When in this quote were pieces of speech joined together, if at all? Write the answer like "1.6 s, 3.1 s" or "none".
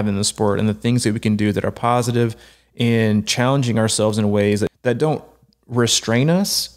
4.7 s